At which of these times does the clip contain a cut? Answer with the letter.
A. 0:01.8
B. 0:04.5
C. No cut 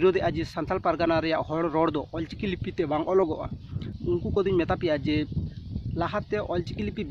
C